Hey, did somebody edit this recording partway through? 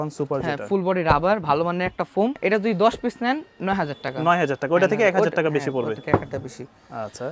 no; 0 cuts

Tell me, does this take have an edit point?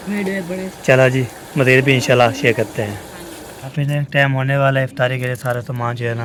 no; 0 cuts

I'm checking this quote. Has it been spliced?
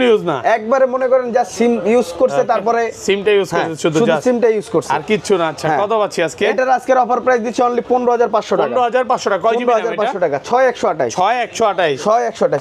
no; 0 cuts

